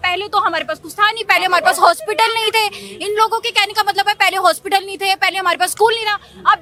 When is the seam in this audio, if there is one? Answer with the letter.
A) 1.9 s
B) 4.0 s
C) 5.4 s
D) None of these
D